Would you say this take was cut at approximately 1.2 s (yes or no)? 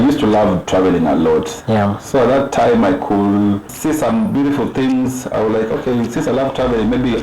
no